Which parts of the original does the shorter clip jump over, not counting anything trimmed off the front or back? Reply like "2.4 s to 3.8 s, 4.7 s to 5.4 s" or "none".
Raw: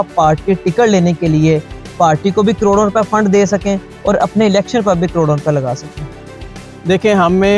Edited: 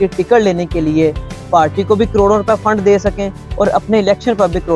none